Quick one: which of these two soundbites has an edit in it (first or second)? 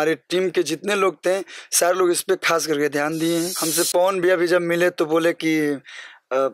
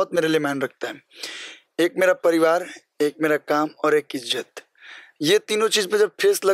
first